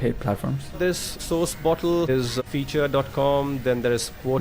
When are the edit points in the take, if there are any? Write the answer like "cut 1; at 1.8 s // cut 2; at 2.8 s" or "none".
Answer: none